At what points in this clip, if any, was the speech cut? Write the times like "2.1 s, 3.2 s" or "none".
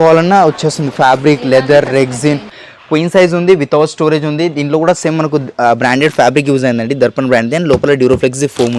2.6 s